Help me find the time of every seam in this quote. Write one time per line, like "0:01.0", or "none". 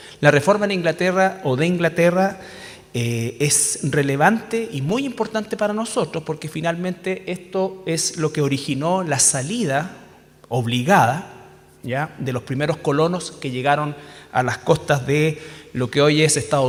none